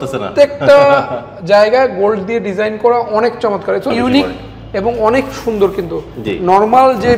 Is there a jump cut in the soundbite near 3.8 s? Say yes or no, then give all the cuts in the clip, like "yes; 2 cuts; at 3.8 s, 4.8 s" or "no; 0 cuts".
yes; 1 cut; at 3.8 s